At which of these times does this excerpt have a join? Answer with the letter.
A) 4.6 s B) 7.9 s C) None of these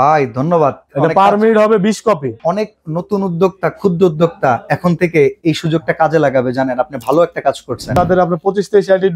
B